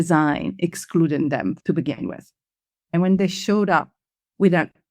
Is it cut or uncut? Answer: cut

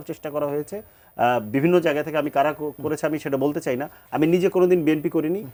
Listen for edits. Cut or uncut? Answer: uncut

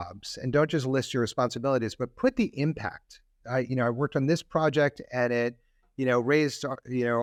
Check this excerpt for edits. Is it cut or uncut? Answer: uncut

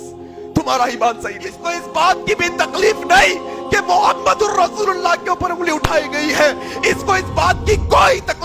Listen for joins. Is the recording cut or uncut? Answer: cut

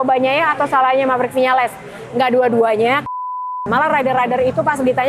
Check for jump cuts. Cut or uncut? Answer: cut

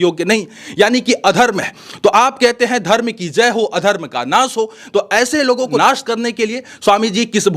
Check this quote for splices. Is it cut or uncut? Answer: cut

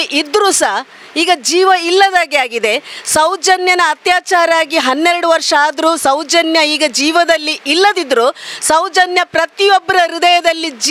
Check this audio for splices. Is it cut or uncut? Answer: uncut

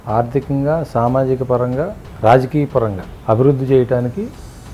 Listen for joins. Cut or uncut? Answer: cut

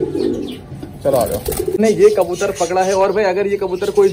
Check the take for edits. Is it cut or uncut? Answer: cut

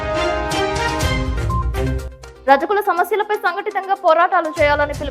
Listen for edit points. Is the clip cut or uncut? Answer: cut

